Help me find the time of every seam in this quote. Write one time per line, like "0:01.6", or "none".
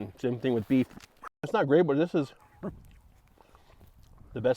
0:01.5